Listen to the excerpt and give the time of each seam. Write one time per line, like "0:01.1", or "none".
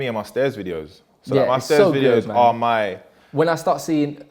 none